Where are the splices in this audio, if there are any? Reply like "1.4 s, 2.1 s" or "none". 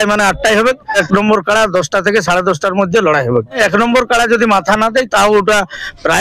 1.0 s, 3.6 s